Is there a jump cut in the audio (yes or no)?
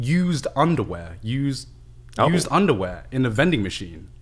no